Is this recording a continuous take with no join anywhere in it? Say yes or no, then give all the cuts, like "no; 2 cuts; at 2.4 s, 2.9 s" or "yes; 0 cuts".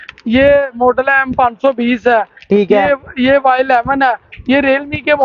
yes; 0 cuts